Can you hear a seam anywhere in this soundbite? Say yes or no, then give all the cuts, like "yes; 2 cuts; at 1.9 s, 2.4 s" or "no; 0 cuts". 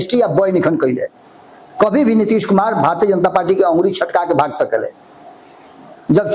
no; 0 cuts